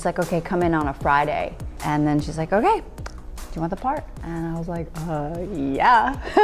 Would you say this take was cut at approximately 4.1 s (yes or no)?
yes